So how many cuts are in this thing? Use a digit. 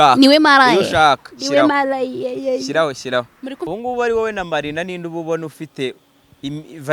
1